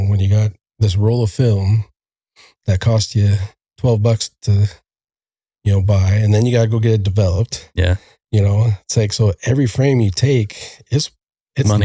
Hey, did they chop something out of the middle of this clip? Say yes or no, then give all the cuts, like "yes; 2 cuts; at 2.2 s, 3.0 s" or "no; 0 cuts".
no; 0 cuts